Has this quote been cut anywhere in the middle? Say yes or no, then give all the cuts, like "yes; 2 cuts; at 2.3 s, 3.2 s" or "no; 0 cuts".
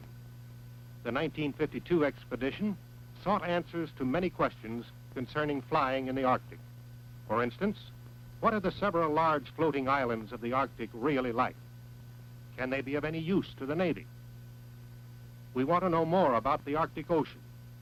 no; 0 cuts